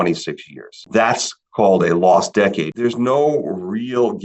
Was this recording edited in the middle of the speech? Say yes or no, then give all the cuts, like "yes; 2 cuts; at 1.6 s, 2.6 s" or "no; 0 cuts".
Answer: yes; 1 cut; at 2.7 s